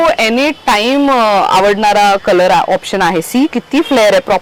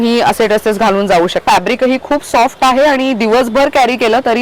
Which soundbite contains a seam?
second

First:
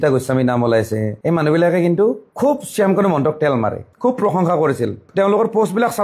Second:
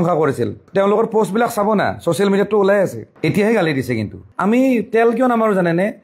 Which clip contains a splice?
second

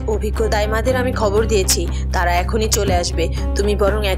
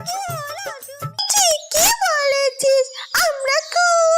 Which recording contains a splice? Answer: second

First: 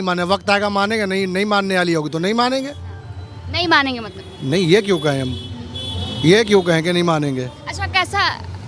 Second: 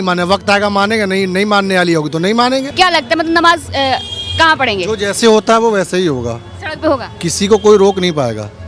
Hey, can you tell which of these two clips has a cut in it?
second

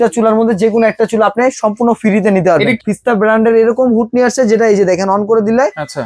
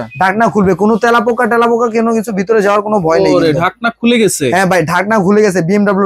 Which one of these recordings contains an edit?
first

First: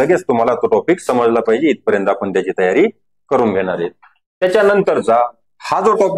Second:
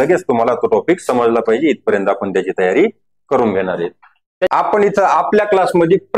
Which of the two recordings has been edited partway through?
second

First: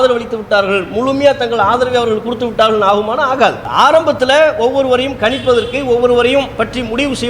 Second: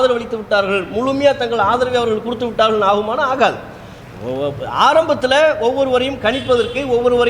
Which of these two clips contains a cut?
first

